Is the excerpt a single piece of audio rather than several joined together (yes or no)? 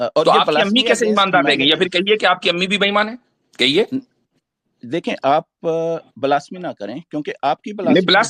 yes